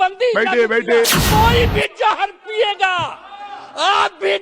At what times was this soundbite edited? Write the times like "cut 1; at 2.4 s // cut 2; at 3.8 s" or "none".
cut 1; at 1.2 s